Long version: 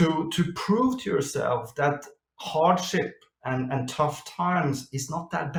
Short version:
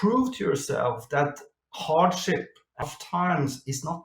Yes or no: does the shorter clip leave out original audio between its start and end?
yes